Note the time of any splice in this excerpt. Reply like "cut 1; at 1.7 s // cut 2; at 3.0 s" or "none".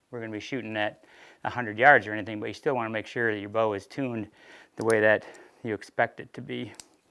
none